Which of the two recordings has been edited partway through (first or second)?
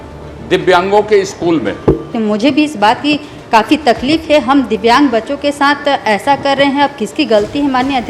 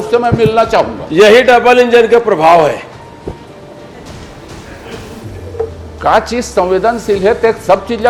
first